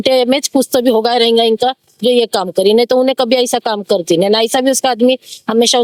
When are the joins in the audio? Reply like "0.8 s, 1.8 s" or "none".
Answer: none